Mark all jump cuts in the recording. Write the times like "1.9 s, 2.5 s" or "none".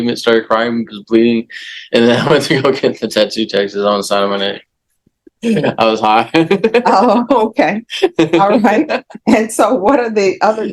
5.1 s